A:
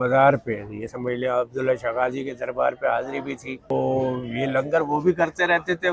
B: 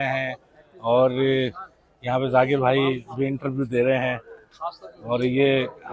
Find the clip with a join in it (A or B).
A